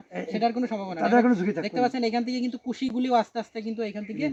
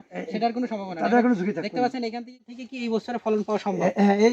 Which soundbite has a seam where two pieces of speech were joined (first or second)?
second